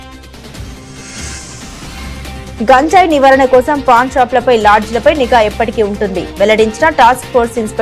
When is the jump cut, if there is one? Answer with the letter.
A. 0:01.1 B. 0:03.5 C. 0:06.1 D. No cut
A